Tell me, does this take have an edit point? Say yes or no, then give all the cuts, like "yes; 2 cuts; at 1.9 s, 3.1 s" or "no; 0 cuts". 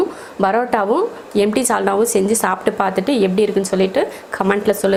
no; 0 cuts